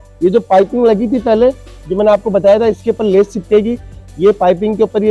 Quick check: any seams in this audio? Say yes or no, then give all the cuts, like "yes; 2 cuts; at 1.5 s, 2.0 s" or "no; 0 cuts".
no; 0 cuts